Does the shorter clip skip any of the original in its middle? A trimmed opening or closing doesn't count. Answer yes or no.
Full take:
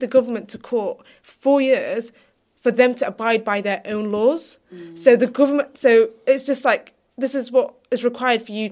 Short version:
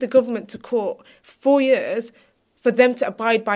no